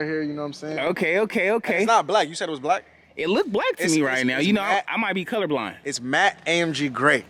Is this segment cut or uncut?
uncut